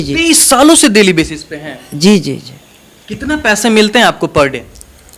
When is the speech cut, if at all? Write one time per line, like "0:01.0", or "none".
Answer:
none